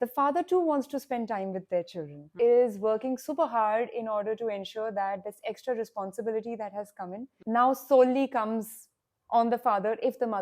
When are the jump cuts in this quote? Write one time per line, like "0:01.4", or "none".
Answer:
0:02.4
0:07.3